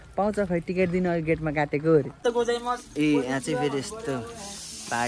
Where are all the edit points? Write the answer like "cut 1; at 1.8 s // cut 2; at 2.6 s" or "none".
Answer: cut 1; at 2.2 s